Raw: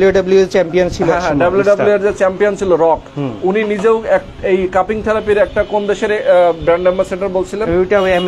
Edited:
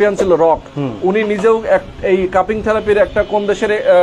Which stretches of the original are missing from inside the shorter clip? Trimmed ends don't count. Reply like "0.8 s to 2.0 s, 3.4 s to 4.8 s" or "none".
none